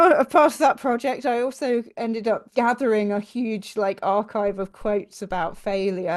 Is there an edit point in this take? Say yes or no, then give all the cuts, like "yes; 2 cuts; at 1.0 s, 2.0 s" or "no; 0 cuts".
yes; 1 cut; at 2.5 s